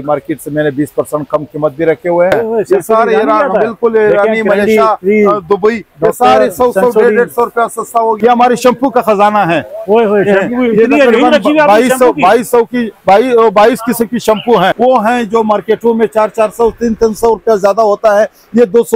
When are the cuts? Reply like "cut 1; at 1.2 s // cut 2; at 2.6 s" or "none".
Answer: cut 1; at 2.3 s // cut 2; at 8.2 s // cut 3; at 14.7 s